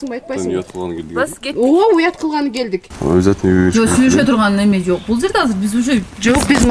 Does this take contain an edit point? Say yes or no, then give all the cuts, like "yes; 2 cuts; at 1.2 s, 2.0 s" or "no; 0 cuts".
yes; 1 cut; at 2.9 s